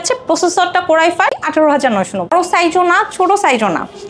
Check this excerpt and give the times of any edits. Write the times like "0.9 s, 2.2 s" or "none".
1.4 s, 2.3 s